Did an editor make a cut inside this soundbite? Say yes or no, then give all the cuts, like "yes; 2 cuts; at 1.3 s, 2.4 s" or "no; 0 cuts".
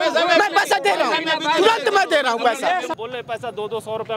yes; 1 cut; at 2.9 s